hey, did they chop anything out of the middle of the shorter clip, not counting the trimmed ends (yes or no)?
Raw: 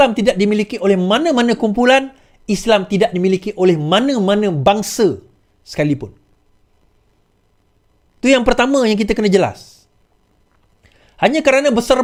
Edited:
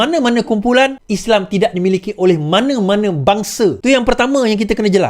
yes